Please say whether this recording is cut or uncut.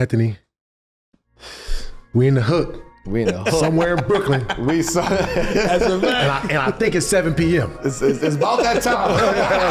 uncut